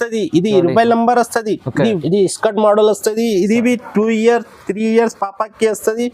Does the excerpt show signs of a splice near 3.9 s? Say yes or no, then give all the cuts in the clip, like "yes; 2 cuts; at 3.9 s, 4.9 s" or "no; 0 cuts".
no; 1 cut; at 2.0 s